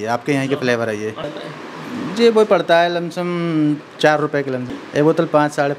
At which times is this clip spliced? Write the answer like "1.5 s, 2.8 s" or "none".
1.3 s, 4.7 s